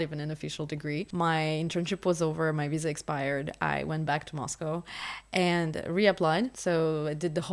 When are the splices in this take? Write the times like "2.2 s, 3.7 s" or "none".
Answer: 1.1 s, 6.6 s